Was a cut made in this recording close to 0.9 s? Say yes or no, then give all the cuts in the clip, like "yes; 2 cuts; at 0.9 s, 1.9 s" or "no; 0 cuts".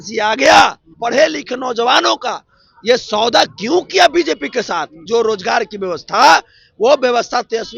yes; 2 cuts; at 0.9 s, 4.9 s